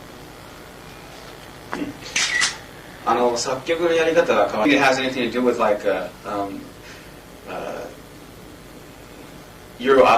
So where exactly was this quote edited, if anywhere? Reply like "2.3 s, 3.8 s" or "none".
6.2 s